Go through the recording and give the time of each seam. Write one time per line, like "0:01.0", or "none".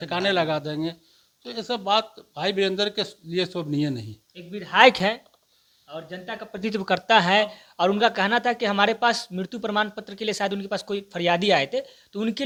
none